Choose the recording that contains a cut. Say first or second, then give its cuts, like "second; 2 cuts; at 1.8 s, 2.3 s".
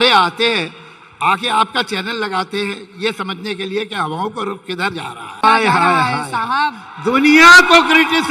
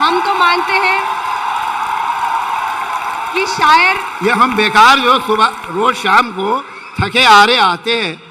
first; 1 cut; at 5.4 s